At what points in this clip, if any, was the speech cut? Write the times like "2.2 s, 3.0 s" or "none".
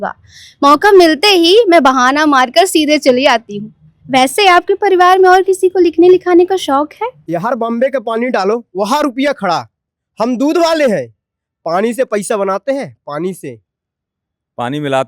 7.2 s

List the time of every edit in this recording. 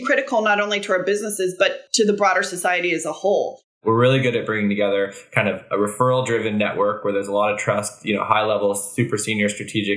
3.8 s

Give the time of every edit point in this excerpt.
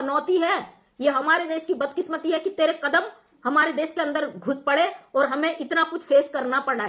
none

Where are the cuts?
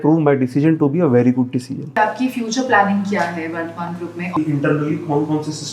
1.9 s, 4.3 s

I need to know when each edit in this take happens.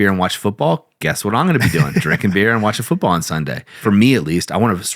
3.8 s

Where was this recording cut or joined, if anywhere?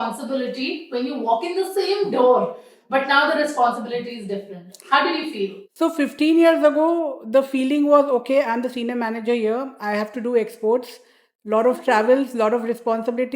none

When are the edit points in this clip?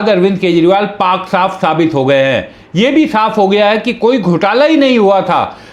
none

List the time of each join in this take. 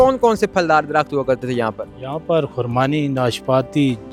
none

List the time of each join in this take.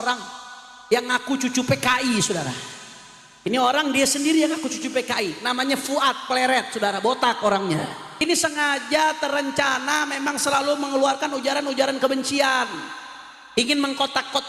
8.2 s

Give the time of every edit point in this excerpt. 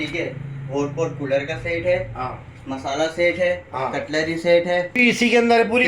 5.0 s

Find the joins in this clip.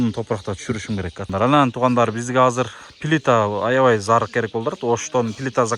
1.3 s

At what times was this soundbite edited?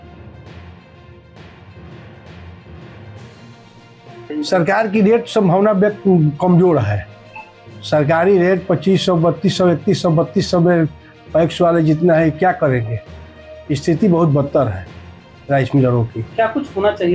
none

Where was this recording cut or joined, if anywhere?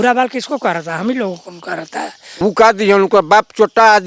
2.2 s

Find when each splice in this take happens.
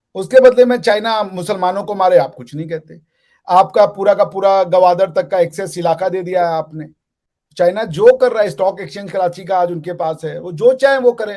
none

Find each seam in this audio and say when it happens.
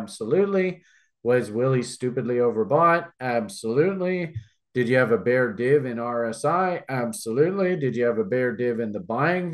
none

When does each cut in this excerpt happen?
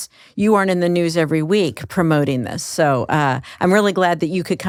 none

